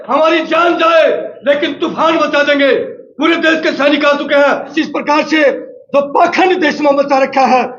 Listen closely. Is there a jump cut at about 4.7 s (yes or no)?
yes